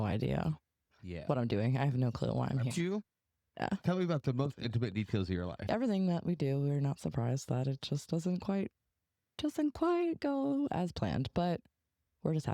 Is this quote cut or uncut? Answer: cut